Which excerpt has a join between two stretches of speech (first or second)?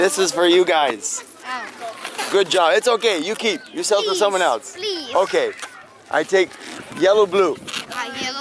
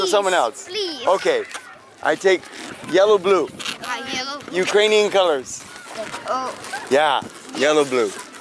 second